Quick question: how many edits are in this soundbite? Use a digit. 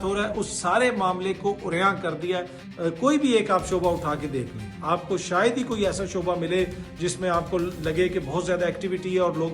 1